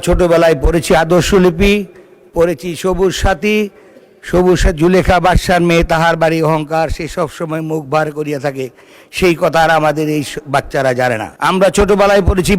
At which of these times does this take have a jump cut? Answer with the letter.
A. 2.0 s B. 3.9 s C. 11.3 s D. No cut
C